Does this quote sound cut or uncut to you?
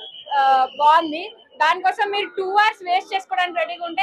uncut